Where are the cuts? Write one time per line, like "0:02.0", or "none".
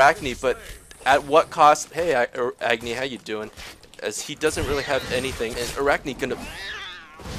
0:01.9
0:05.5